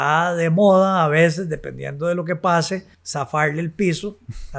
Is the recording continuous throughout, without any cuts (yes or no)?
no